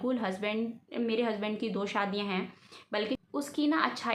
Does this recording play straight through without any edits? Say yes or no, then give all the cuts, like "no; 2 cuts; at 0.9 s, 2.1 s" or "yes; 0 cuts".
no; 1 cut; at 3.2 s